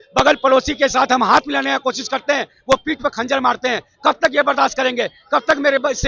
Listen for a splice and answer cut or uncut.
uncut